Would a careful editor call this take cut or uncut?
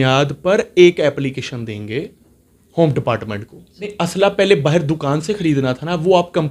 cut